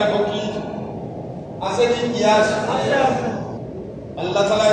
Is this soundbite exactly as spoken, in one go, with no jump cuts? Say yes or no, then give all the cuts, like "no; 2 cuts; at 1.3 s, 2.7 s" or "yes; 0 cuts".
no; 1 cut; at 3.5 s